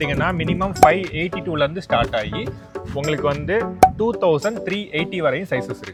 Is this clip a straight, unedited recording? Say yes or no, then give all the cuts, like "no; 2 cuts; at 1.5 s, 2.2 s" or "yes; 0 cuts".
yes; 0 cuts